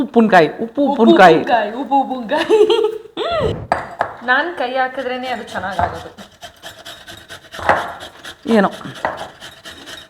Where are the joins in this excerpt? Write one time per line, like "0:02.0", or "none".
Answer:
0:03.6